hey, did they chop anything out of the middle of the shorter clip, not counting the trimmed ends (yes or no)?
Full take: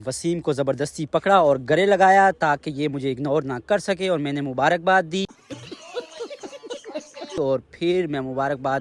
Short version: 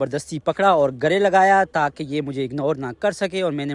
no